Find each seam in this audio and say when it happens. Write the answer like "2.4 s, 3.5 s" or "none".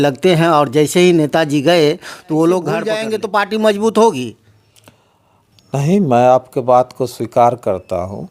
3.0 s

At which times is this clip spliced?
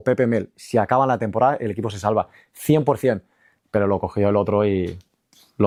none

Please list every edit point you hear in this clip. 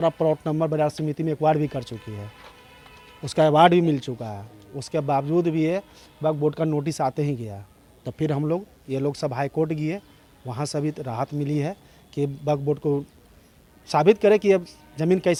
none

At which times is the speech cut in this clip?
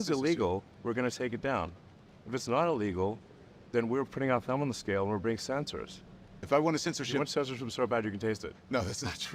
6.4 s

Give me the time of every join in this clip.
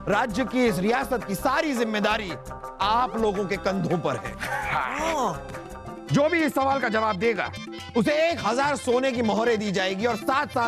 2.7 s, 5.9 s

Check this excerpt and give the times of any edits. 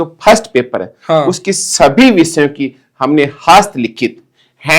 none

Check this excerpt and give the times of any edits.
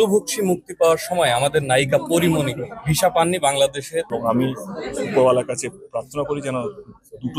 4.1 s

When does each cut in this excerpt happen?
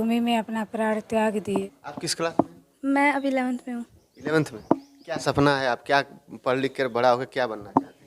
1.6 s

